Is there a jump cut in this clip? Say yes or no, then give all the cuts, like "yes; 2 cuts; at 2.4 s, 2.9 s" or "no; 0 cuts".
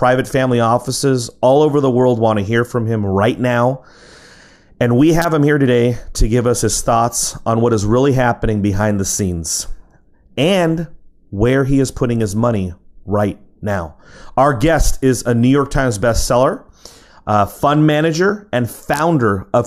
no; 0 cuts